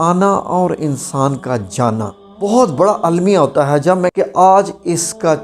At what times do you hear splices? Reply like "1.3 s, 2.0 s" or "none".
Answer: 2.2 s, 4.1 s